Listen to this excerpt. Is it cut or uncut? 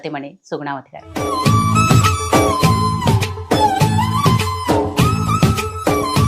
cut